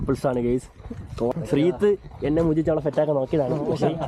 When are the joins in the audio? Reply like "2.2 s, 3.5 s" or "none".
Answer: 1.3 s